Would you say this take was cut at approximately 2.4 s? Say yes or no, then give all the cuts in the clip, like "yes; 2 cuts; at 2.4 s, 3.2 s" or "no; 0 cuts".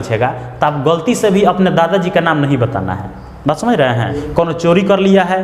no; 1 cut; at 4.2 s